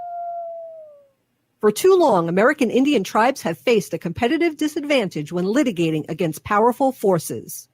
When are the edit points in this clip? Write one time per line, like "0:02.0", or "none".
0:01.5